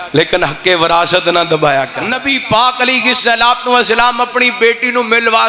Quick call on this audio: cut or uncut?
cut